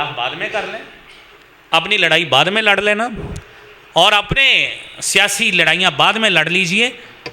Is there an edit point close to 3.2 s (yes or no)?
no